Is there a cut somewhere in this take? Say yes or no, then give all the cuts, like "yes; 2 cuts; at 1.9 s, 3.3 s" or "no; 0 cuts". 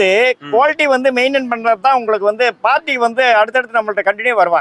no; 0 cuts